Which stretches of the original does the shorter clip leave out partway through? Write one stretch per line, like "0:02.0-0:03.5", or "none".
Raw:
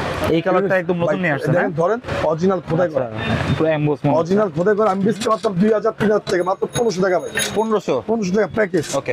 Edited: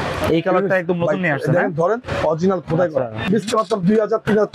0:03.2-0:05.0